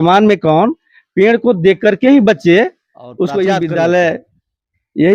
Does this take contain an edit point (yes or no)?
yes